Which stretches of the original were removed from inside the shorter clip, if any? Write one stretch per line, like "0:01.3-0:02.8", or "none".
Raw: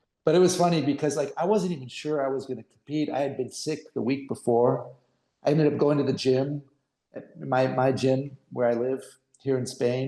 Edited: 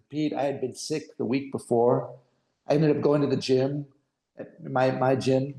none